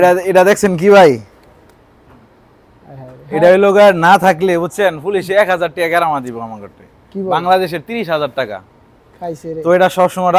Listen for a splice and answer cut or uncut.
uncut